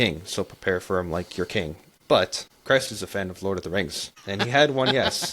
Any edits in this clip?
yes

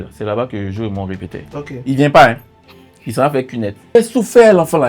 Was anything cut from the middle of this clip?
yes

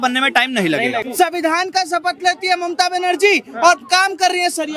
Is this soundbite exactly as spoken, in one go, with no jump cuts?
no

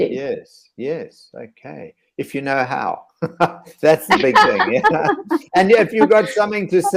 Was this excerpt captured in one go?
yes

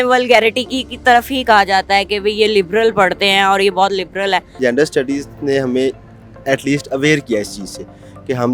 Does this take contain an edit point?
yes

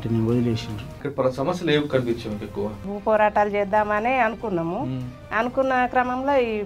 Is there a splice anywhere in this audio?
yes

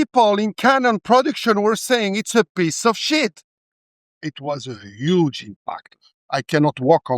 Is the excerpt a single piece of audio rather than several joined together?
no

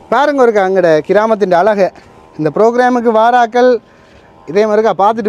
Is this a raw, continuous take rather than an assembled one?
yes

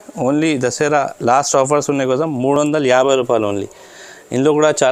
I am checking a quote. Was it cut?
no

